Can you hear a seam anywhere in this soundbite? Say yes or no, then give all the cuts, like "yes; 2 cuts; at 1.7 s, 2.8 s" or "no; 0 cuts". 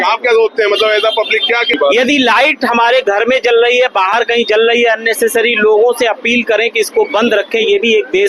yes; 1 cut; at 1.6 s